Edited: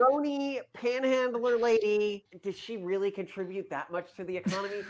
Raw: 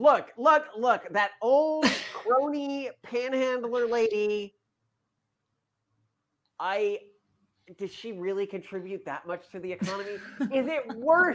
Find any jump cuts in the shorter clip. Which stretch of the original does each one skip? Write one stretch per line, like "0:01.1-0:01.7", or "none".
0:04.6-0:07.7